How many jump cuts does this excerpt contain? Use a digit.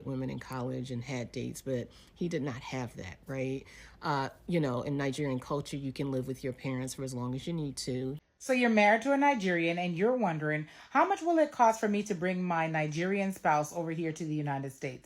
1